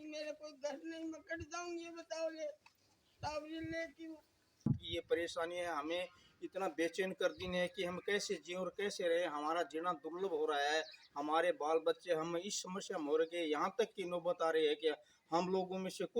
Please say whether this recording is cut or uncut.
cut